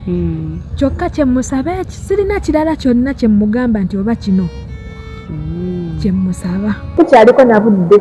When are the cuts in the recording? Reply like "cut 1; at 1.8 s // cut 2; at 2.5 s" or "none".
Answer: cut 1; at 7.0 s